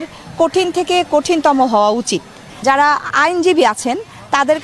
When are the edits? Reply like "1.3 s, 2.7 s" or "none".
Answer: 2.6 s